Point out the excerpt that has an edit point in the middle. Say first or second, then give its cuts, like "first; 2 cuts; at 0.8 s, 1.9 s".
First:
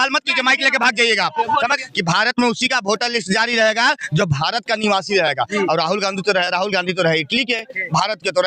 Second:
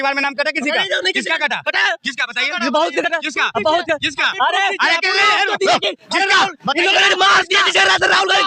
first; 1 cut; at 1.8 s